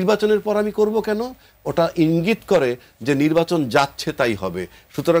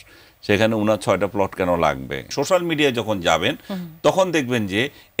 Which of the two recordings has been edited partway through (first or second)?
second